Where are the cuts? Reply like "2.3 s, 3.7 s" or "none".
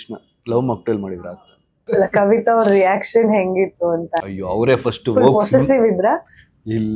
1.9 s